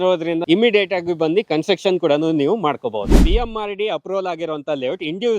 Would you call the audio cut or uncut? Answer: cut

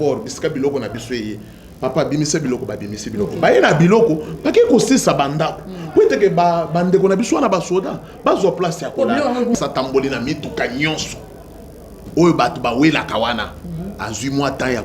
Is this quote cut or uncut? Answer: cut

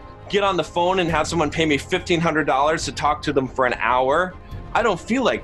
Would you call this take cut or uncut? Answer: uncut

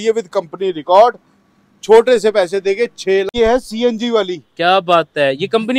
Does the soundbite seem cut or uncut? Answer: cut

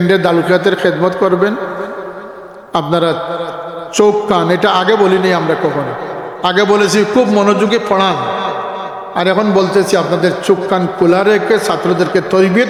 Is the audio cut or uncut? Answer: uncut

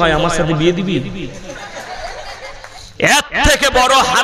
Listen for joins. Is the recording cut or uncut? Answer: cut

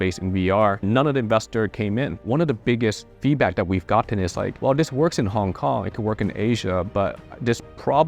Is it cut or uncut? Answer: cut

